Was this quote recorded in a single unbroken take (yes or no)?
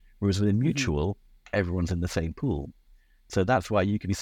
yes